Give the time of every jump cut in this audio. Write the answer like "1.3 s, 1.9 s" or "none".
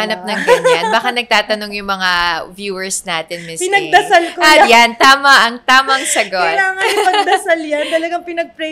none